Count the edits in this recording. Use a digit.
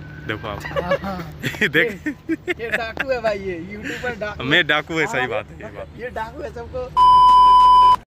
1